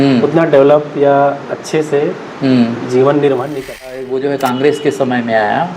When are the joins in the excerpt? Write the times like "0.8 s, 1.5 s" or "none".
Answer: 4.0 s